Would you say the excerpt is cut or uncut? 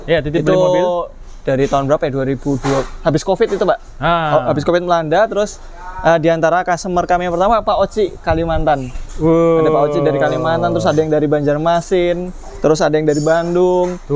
uncut